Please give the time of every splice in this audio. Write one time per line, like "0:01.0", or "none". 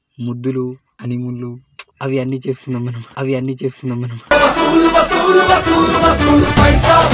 0:01.9